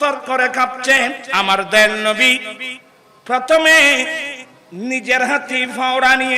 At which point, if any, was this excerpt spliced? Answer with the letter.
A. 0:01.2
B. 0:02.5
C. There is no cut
A